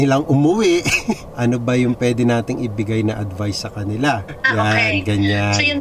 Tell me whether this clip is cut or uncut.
cut